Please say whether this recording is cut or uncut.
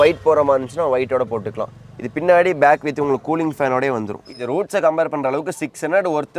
cut